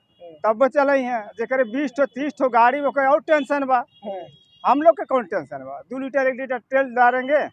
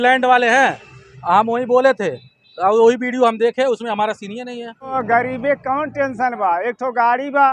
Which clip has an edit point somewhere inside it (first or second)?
second